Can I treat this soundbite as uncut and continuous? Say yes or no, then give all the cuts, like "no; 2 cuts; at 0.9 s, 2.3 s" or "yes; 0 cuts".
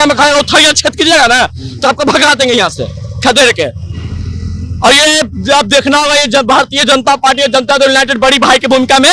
yes; 0 cuts